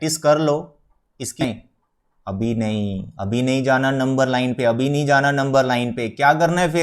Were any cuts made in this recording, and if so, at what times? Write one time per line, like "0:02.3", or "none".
0:01.4

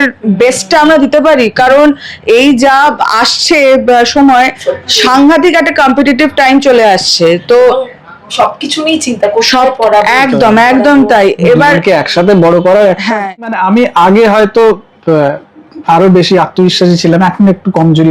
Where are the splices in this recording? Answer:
0:13.5

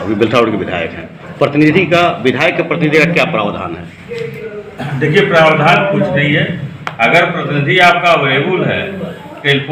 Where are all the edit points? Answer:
none

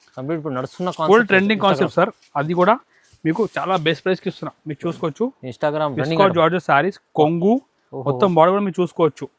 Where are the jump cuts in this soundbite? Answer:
none

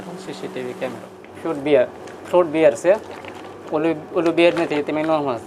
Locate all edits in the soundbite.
0:01.2

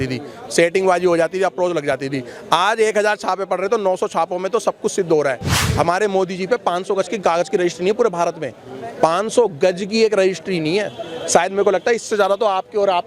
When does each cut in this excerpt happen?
0:05.6

